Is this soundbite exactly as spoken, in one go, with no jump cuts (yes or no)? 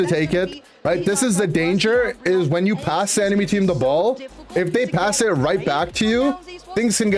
yes